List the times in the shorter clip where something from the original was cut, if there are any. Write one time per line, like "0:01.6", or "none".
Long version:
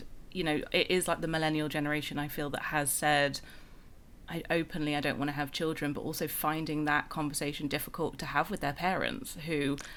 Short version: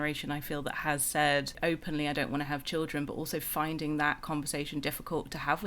0:01.5